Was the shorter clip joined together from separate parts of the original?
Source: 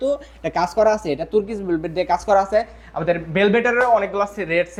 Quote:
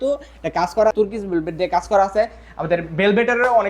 yes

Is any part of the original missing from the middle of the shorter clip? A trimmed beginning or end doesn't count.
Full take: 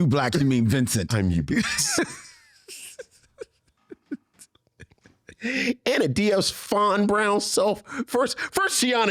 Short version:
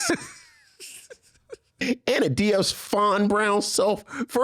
yes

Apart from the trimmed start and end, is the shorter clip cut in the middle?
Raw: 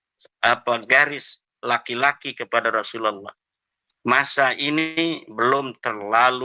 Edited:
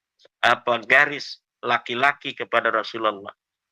no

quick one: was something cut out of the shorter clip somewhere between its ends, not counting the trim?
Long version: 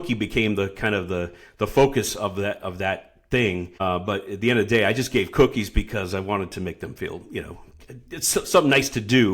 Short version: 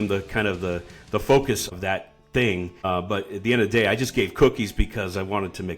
yes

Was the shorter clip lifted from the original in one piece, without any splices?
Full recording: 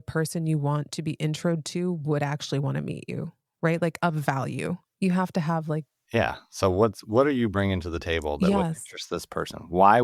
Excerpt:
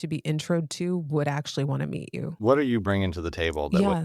no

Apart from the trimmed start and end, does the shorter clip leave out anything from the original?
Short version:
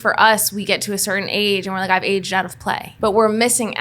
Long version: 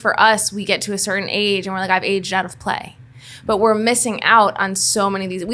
yes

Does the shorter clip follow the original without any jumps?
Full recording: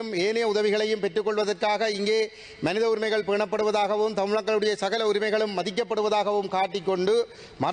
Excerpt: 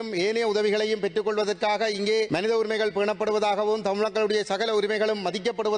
no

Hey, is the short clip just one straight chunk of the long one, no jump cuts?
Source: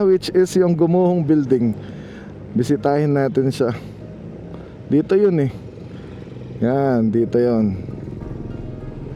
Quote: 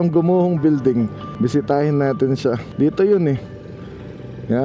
no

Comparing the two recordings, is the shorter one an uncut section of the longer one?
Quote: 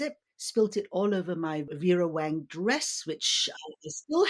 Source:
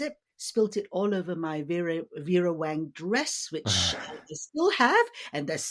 no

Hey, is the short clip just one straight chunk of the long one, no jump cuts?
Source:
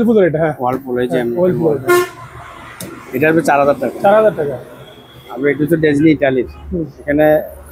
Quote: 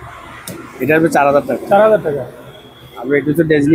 yes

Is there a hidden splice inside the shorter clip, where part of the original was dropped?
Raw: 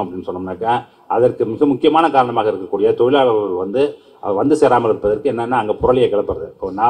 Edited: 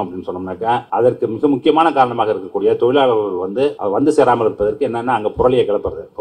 yes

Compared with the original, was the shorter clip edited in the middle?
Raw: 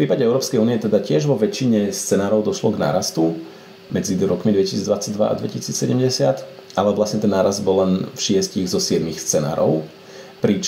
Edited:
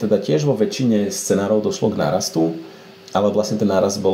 yes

